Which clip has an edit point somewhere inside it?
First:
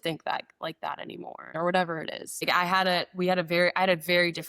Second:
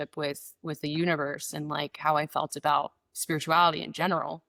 first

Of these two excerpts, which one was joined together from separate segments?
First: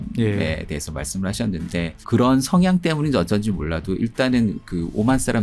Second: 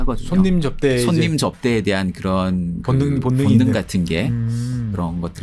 first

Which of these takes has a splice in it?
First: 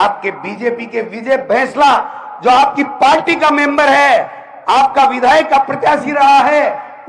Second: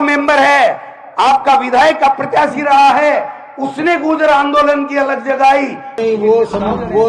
second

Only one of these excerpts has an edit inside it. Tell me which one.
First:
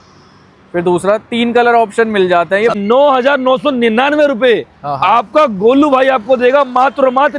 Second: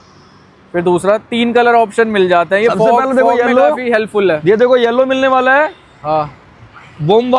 first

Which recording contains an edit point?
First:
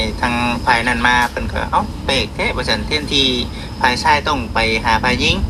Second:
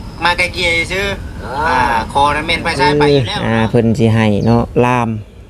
second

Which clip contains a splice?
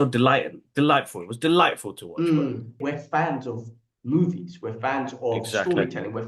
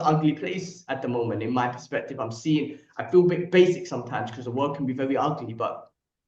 first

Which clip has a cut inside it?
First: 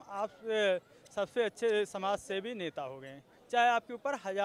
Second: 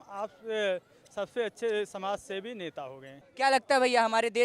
second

